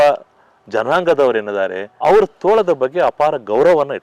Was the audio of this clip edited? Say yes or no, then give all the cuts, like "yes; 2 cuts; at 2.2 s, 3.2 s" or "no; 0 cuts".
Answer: yes; 1 cut; at 1.8 s